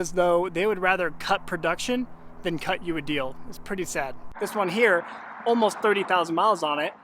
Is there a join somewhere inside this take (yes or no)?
yes